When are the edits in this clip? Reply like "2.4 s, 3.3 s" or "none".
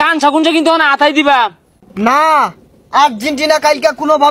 none